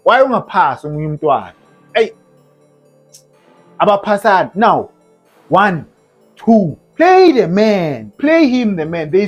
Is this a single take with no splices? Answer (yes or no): yes